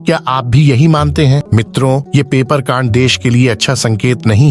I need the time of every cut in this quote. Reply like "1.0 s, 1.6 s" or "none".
1.4 s